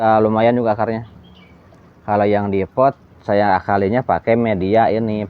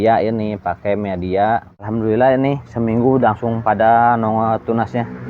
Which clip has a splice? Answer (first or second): second